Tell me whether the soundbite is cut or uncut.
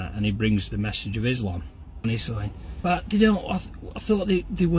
cut